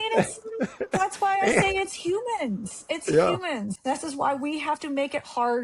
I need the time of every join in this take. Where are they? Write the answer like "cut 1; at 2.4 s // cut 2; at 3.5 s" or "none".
cut 1; at 3.7 s